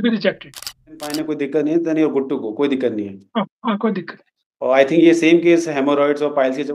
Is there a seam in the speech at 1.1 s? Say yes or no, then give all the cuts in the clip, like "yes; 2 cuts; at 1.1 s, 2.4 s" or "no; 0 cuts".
yes; 1 cut; at 1.1 s